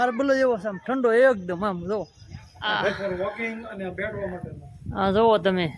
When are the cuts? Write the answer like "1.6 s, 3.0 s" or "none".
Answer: 2.9 s